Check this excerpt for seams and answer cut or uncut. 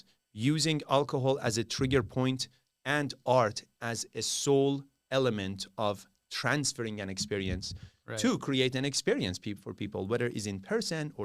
uncut